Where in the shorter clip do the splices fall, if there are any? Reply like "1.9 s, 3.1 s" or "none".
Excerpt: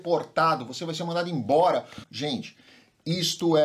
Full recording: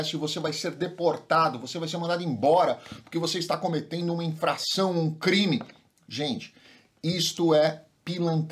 2.0 s